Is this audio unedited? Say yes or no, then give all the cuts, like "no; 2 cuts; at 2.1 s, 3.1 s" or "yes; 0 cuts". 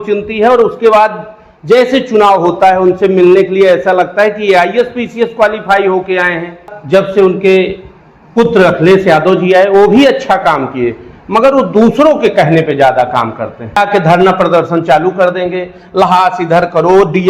no; 2 cuts; at 6.7 s, 13.8 s